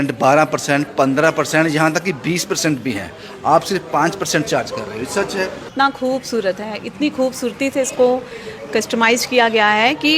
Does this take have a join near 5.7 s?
yes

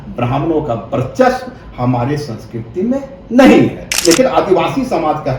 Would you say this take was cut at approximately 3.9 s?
yes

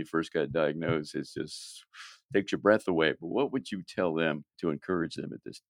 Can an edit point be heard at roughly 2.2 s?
no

